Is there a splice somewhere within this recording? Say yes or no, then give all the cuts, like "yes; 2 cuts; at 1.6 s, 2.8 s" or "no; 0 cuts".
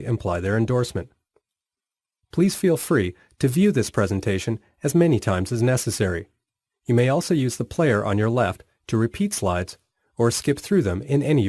yes; 1 cut; at 6.2 s